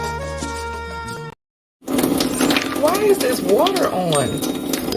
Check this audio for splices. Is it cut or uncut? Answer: cut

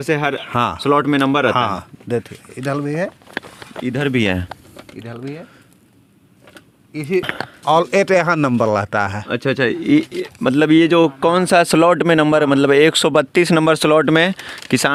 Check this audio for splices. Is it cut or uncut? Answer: uncut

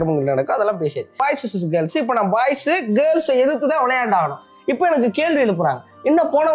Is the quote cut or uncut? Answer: cut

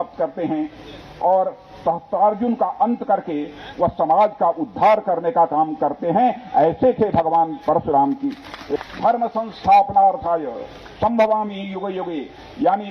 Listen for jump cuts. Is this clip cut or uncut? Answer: cut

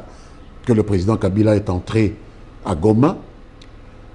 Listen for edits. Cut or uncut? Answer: uncut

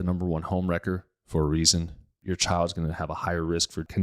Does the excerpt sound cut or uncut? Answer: cut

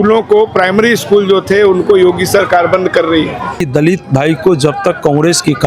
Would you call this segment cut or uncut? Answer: cut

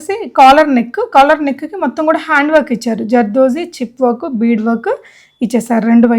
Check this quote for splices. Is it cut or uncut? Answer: uncut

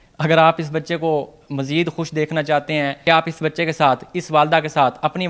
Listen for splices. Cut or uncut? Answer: cut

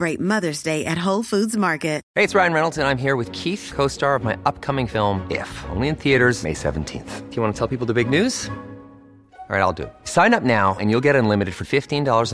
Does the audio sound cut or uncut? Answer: cut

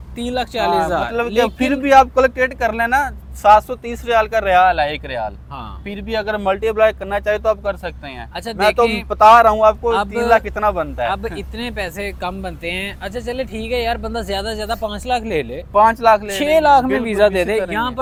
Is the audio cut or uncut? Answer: uncut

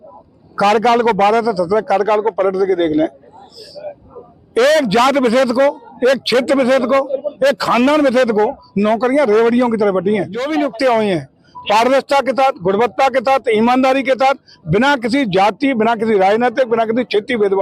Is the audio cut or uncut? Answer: cut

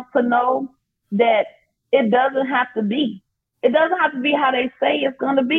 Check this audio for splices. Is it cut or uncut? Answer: uncut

